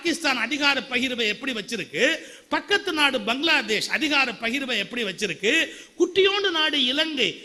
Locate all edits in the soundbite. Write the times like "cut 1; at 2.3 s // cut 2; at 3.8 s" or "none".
none